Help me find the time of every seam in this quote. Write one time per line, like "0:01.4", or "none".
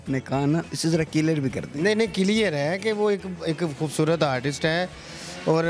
none